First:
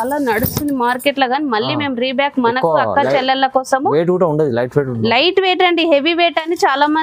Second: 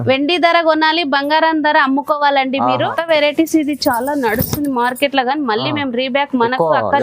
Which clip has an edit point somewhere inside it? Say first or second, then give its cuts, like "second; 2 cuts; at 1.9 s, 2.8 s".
second; 1 cut; at 2.9 s